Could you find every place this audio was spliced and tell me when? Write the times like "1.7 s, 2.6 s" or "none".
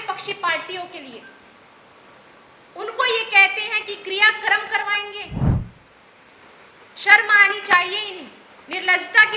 5.2 s, 5.8 s